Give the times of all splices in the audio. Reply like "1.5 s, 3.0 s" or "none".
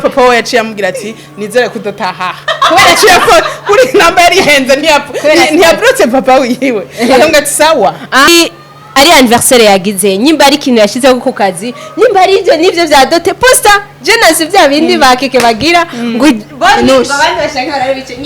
8.3 s